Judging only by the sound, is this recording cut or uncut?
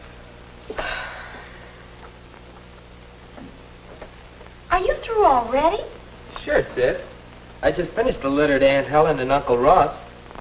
uncut